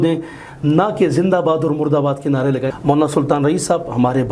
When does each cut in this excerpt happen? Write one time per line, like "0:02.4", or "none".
0:02.7

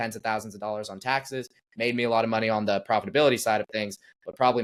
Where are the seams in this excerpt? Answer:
none

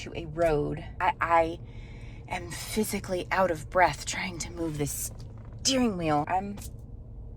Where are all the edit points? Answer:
0:00.9
0:06.3

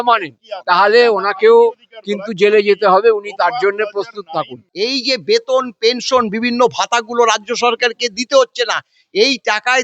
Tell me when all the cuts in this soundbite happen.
0:04.6

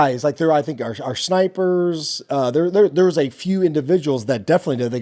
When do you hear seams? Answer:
none

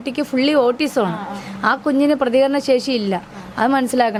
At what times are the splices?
none

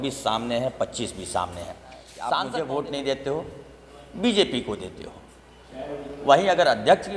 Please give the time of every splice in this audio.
0:02.3

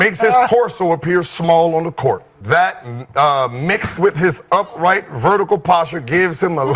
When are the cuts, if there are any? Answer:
0:02.3

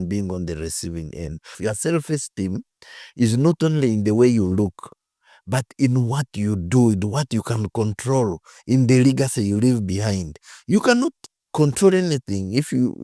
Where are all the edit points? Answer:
0:01.6

